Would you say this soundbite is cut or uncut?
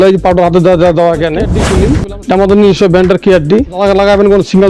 cut